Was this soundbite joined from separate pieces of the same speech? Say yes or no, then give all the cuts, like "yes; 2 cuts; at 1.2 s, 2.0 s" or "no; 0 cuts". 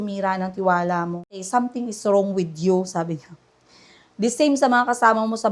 yes; 1 cut; at 1.4 s